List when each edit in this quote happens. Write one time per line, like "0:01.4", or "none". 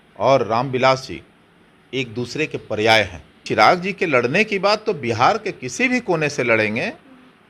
0:03.4

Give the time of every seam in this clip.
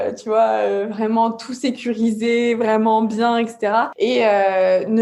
0:03.9

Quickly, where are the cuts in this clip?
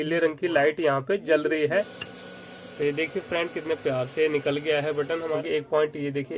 0:02.0
0:05.4

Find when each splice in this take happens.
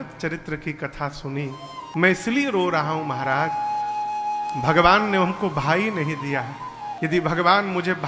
0:01.9
0:06.9

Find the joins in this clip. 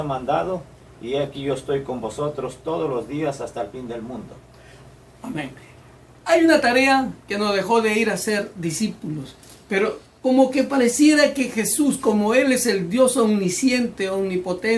0:02.5

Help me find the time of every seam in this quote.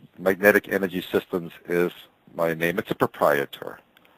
0:01.0

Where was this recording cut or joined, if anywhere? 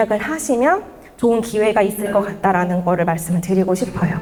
none

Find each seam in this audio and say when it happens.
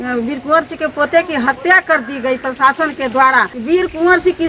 0:03.5

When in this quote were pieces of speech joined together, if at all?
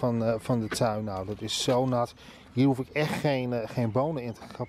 none

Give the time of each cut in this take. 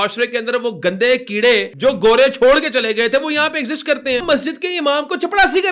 0:01.7
0:04.2

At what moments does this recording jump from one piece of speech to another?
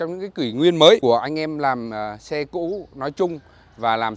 0:01.0

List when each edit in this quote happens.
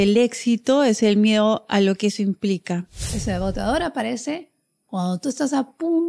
0:03.1

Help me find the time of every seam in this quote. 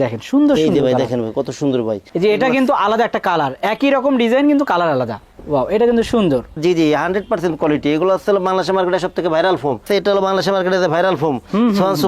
0:02.1
0:06.6
0:09.8

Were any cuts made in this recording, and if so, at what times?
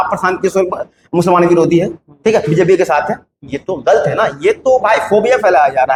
none

